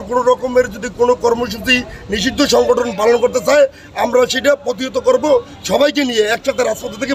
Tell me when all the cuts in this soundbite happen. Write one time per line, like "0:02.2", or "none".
none